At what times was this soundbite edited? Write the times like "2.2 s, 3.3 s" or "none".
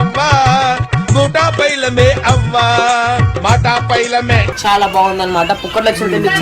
4.5 s